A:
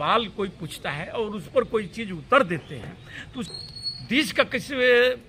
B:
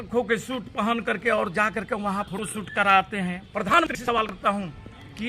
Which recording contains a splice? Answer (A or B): B